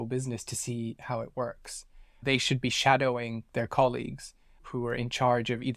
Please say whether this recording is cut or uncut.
uncut